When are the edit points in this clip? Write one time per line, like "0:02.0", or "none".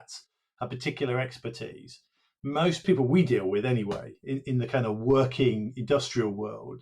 0:02.8